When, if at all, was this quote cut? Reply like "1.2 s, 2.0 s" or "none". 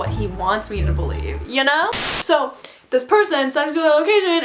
2.0 s

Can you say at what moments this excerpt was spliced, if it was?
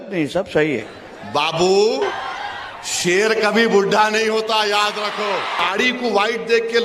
0.9 s, 2.2 s, 5.6 s

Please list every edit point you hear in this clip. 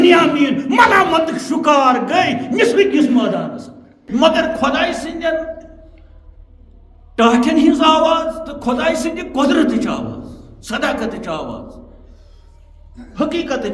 3.9 s

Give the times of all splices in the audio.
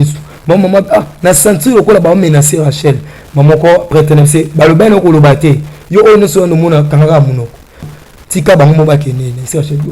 7.9 s

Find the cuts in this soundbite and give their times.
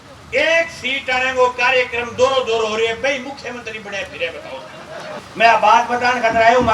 5.1 s

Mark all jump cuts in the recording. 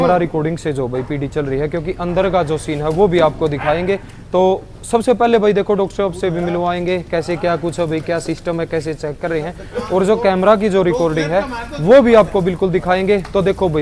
none

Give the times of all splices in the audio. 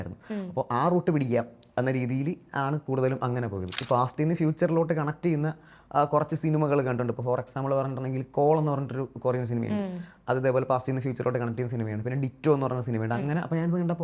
3.8 s

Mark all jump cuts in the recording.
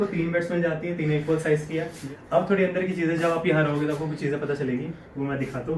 2.0 s

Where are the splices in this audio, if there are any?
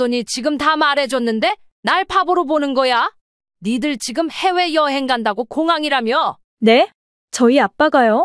6.5 s

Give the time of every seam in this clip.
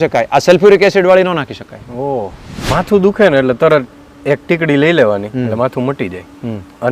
2.7 s

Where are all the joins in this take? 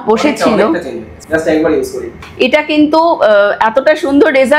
2.2 s

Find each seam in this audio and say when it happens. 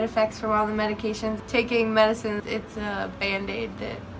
1.4 s, 2.4 s

